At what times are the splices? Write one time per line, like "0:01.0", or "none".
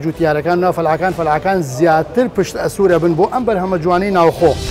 none

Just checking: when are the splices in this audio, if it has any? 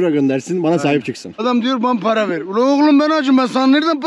0:01.4

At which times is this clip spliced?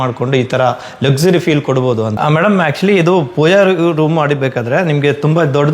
0:02.1

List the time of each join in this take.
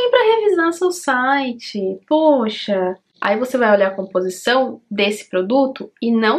0:03.1

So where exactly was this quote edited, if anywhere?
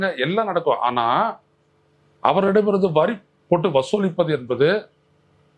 none

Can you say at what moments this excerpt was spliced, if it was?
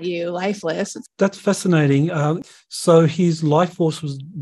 0:01.0
0:02.4

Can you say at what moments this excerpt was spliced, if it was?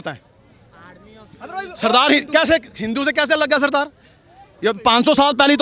none

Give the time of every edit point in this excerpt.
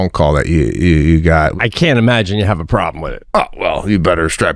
0:01.5
0:03.1

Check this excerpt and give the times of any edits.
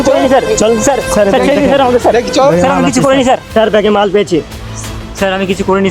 0:03.5

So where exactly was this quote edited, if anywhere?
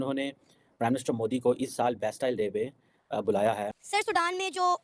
0:03.8

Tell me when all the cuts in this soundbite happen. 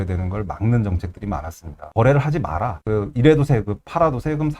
0:01.8
0:02.7

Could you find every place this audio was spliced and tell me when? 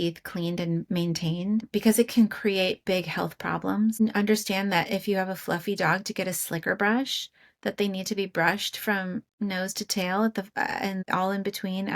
0:01.7
0:03.9

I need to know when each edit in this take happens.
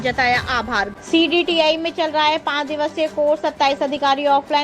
0:00.9

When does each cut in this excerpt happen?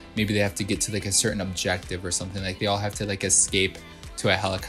none

